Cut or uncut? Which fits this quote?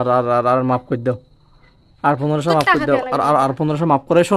uncut